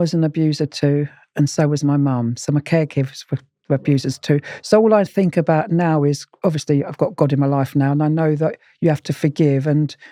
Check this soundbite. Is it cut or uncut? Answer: uncut